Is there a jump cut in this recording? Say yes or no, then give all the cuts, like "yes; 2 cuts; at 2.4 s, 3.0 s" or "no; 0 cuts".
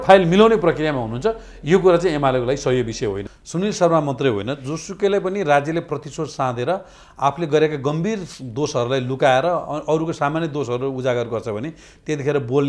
yes; 1 cut; at 3.3 s